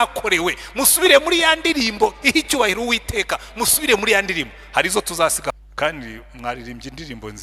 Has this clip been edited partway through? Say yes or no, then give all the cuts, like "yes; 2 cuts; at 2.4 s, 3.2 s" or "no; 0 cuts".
yes; 1 cut; at 5.5 s